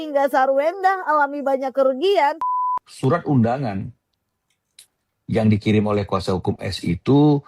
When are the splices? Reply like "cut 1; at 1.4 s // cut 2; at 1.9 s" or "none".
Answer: cut 1; at 2.5 s